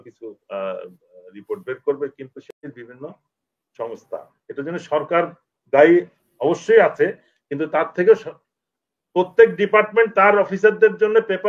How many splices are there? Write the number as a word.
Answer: one